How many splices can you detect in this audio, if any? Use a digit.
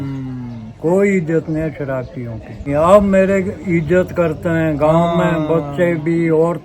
1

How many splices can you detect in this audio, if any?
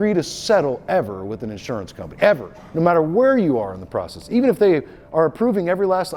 0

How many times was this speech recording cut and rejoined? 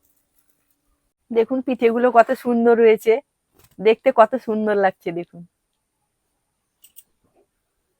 1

